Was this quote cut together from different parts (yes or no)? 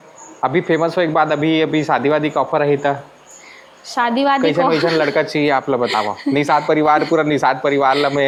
no